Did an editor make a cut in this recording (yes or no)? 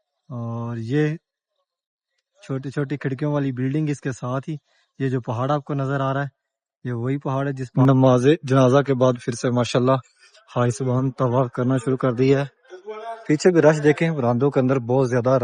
yes